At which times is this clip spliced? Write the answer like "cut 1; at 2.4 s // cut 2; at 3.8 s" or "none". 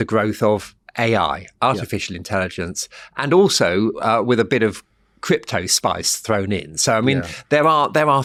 none